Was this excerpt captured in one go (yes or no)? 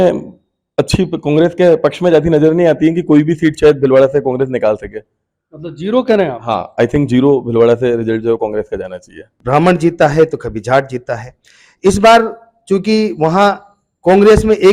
no